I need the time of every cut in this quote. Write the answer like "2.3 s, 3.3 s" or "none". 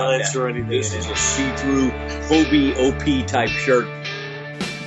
4.0 s